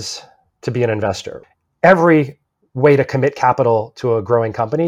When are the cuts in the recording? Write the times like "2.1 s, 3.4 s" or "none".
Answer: 1.4 s, 2.4 s